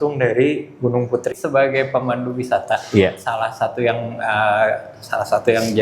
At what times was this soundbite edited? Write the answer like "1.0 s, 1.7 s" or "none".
1.3 s